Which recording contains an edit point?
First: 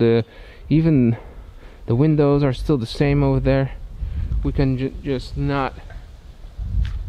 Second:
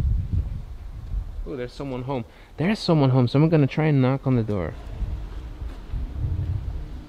second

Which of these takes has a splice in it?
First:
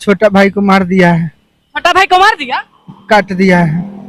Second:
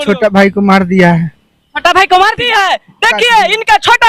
second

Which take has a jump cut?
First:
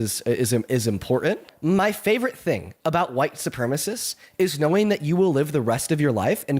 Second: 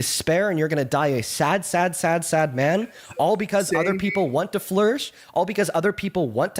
first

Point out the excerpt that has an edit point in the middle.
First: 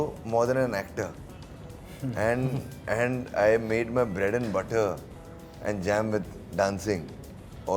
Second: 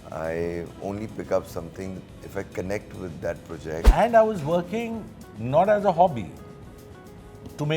second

